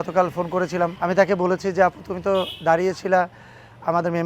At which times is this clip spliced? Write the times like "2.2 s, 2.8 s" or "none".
0.9 s